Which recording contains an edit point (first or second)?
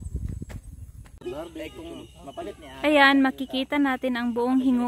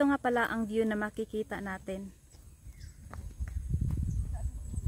first